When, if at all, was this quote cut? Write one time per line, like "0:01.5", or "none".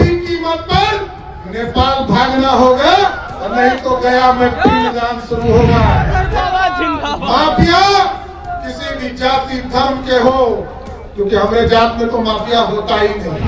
0:06.1

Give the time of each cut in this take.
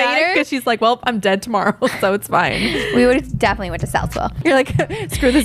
0:04.4

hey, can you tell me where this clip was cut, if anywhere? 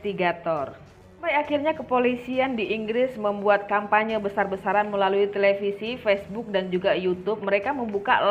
none

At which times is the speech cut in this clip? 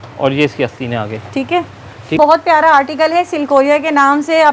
0:02.2

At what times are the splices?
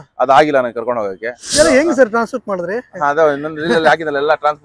0:01.5

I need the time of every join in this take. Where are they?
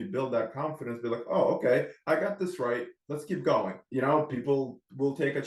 0:03.8

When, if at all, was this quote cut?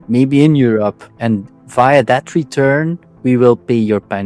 0:01.1

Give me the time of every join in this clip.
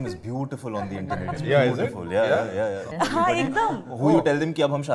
0:02.8

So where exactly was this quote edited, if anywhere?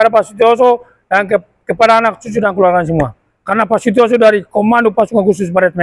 none

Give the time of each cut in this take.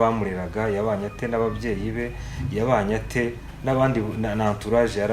none

